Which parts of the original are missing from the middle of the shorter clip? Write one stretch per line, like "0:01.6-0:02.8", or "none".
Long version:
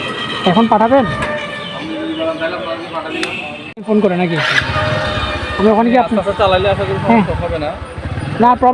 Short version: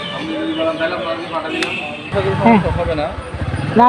0:03.8-0:06.8

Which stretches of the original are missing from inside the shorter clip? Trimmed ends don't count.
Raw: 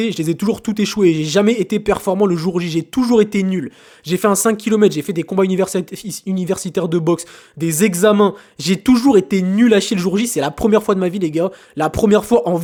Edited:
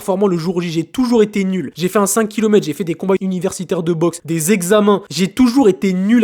0:03.7-0:04.0
0:05.5-0:06.2
0:07.3-0:07.5
0:08.4-0:08.6

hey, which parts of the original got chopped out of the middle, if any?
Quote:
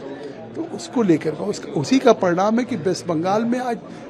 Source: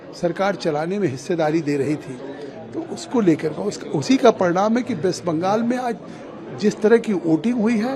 none

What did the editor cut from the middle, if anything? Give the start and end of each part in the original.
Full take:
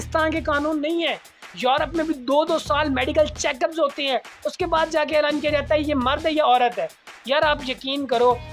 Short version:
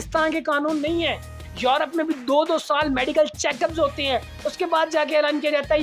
none

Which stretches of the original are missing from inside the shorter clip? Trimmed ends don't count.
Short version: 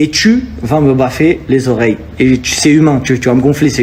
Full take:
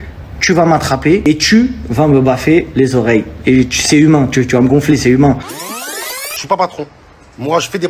none

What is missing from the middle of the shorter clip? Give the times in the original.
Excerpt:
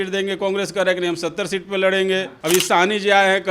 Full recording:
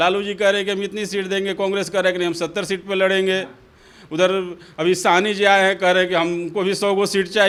0:03.5-0:04.7

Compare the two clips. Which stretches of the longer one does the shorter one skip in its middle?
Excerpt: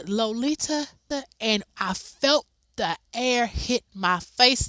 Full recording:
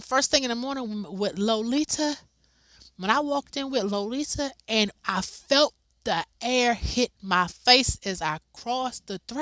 0:02.3-0:04.3

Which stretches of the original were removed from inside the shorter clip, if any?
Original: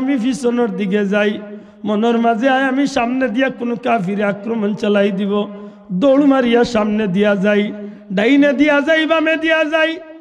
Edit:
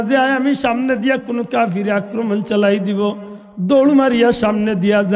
none

